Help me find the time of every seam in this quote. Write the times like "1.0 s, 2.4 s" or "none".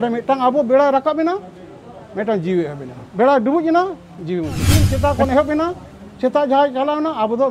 4.9 s